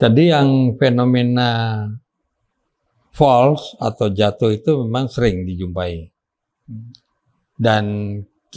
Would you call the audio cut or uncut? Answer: uncut